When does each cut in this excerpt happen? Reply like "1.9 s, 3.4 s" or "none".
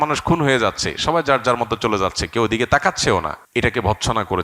3.4 s